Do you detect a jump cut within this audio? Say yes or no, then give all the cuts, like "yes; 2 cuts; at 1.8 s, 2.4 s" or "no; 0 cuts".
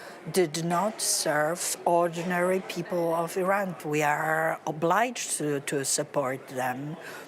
yes; 1 cut; at 3.8 s